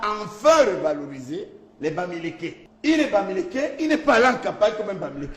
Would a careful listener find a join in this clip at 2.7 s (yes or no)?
yes